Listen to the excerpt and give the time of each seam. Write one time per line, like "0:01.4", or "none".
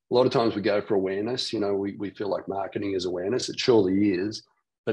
none